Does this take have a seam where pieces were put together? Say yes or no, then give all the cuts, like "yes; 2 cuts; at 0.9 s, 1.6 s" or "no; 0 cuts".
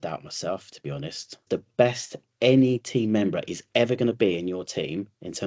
yes; 1 cut; at 1.4 s